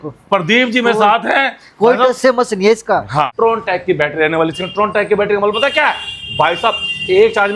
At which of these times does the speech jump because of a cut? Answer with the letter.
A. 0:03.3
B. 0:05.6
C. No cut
A